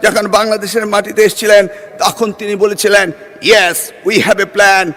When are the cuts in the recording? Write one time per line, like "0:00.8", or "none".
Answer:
none